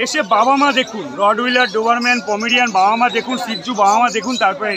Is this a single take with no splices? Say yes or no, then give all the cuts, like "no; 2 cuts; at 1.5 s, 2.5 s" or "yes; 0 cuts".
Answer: yes; 0 cuts